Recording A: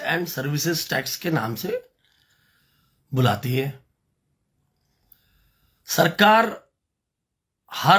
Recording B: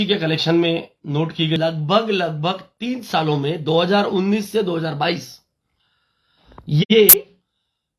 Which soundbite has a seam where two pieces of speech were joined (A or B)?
B